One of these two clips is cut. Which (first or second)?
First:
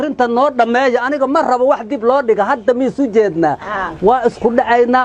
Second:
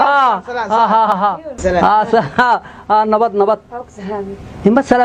second